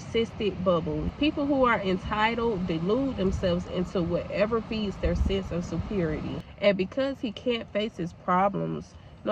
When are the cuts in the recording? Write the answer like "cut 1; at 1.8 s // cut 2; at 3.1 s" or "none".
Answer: cut 1; at 1.1 s // cut 2; at 6.4 s